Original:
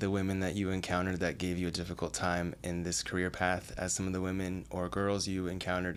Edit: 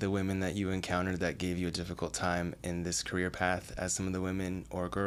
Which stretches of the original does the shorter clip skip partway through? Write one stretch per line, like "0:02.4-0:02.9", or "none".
none